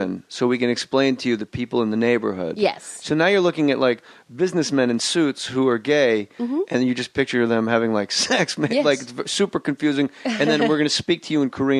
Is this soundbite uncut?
no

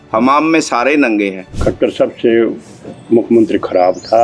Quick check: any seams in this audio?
yes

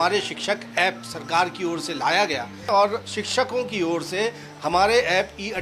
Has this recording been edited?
yes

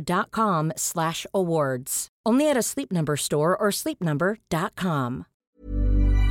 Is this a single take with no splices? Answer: no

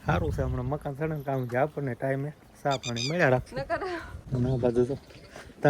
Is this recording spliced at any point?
yes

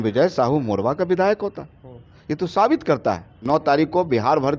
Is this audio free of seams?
no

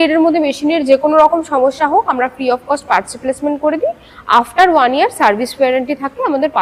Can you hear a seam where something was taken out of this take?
no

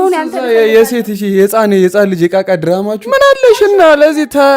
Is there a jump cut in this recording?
yes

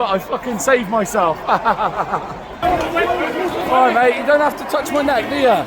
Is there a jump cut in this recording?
yes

